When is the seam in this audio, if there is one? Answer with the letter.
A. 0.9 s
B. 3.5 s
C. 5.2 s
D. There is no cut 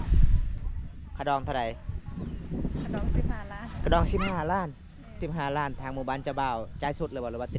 C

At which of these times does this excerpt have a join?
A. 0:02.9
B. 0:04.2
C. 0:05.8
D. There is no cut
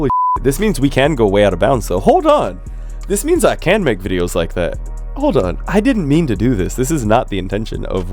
D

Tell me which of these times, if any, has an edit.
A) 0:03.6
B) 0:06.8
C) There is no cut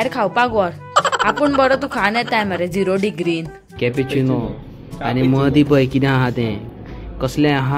A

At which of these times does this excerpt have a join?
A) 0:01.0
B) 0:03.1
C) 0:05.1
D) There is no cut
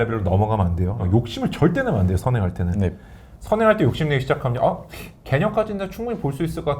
A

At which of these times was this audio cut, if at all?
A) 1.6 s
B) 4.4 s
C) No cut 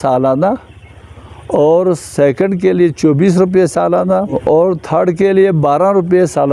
B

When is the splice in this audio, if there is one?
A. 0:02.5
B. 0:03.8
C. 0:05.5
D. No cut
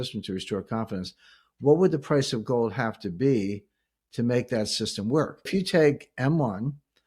C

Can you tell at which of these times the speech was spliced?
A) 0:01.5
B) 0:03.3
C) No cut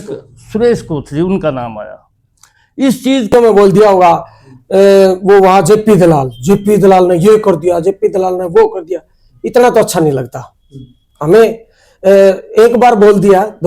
B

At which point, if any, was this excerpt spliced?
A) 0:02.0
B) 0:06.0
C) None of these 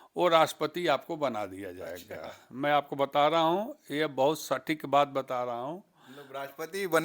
C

